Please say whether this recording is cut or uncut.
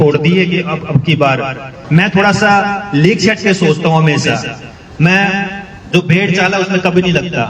cut